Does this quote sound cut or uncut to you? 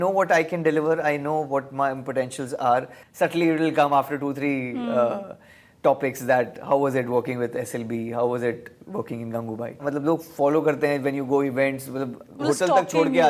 cut